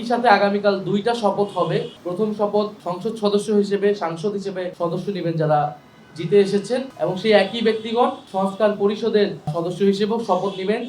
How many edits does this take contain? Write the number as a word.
six